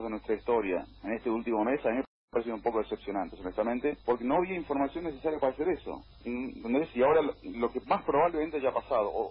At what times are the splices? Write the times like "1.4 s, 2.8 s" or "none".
none